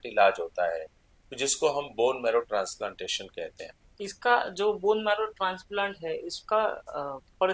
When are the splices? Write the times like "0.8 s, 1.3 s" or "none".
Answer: 3.6 s